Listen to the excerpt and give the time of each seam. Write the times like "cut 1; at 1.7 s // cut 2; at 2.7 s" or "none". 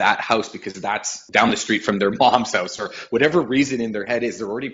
cut 1; at 1.1 s